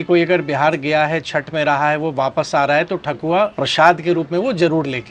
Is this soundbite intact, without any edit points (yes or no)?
no